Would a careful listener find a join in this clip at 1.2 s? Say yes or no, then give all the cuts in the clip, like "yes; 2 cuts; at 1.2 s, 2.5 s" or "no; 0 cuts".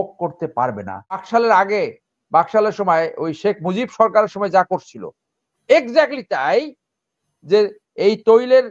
yes; 1 cut; at 1.2 s